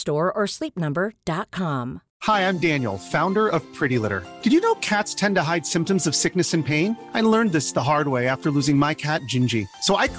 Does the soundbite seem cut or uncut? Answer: cut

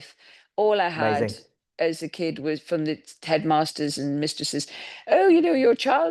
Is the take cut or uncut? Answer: uncut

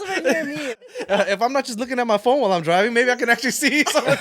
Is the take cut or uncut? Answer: cut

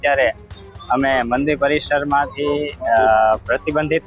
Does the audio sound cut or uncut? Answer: uncut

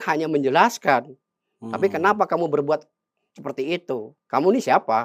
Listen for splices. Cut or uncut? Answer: cut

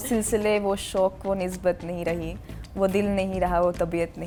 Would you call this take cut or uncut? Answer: uncut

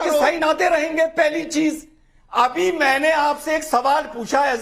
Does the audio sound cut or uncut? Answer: uncut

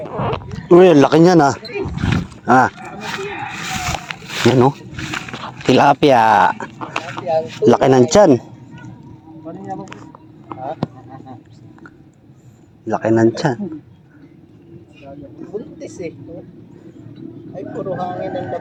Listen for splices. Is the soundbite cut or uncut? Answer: uncut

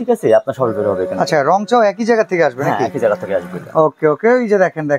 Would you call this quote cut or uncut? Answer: uncut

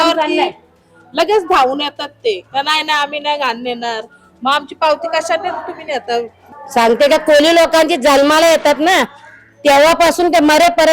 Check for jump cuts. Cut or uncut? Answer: cut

